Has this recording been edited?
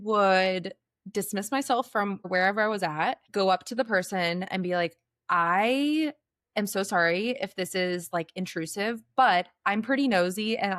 yes; 2 cuts; at 2.3 s, 3.2 s

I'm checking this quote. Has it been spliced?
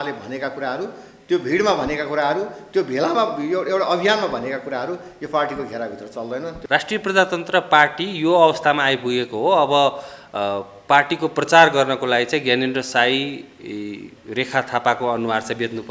yes; 1 cut; at 6.6 s

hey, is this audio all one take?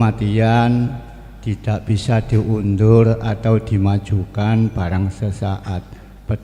yes; 0 cuts

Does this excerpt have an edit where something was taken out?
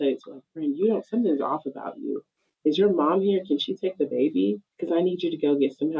yes; 1 cut; at 4.7 s

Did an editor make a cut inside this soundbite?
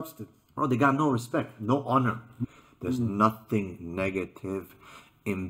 yes; 1 cut; at 2.3 s

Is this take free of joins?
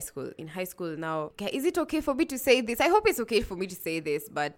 yes; 0 cuts

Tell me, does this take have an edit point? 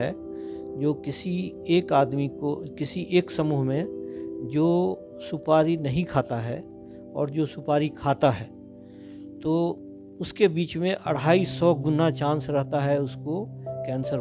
no; 0 cuts

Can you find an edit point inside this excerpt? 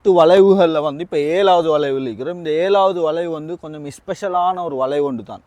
no; 0 cuts

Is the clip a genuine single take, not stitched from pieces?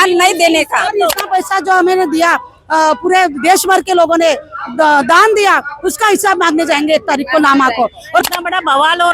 no; 2 cuts; at 1.2 s, 8.2 s

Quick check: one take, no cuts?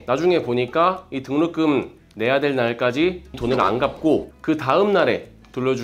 yes; 0 cuts

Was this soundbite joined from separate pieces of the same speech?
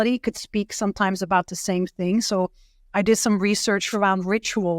yes; 1 cut; at 3.9 s

